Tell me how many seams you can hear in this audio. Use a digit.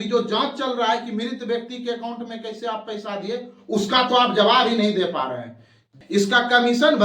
1